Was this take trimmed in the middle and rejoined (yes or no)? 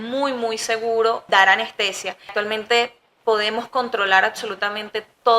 yes